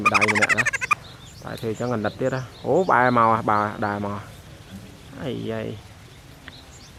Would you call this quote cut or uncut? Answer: uncut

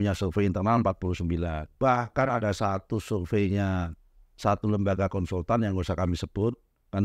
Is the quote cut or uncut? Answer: cut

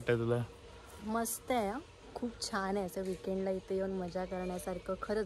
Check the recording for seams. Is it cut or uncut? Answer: uncut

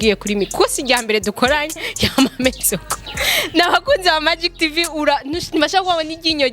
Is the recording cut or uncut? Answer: uncut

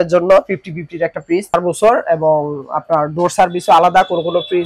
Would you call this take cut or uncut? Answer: cut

